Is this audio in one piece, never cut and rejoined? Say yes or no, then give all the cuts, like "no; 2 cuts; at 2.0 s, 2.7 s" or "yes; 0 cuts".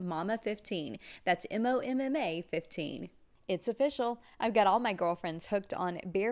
no; 1 cut; at 3.4 s